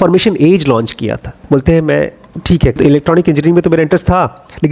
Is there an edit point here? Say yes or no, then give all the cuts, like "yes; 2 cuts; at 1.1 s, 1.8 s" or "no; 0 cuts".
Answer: yes; 2 cuts; at 1.4 s, 2.8 s